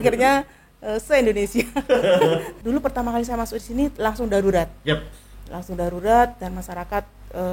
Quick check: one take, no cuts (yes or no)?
no